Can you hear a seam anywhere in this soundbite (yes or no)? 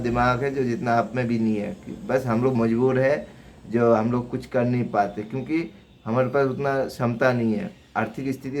no